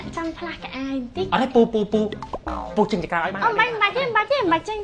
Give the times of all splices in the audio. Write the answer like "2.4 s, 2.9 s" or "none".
1.3 s